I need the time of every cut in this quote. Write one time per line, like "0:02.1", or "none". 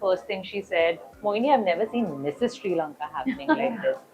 0:01.1

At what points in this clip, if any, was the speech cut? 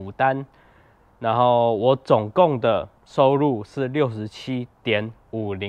none

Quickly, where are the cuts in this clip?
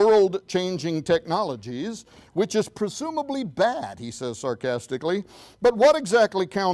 0:01.6

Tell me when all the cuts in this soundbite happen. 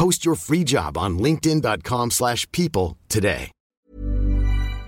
0:03.8

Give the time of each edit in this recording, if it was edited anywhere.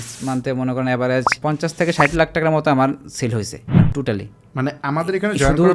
0:01.3
0:03.6

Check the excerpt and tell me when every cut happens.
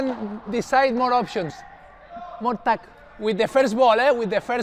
none

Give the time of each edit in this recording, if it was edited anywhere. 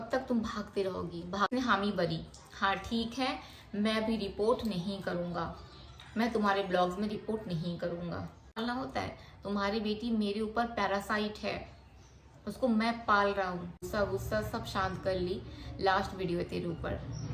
0:01.5
0:08.6
0:13.7

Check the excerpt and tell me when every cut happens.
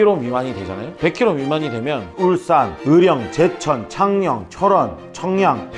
0:02.1

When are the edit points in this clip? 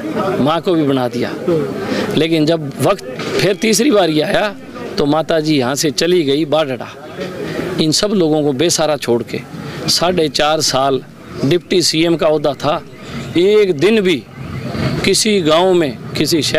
none

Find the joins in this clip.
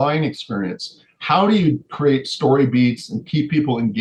none

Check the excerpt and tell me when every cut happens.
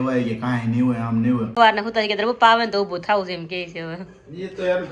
0:01.6

